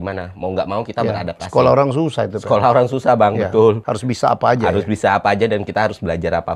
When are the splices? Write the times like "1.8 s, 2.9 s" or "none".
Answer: 3.9 s